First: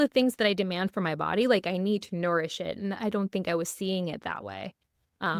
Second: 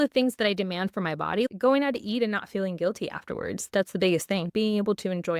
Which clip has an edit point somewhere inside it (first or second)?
second